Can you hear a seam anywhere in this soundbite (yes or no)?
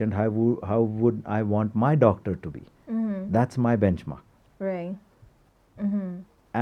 no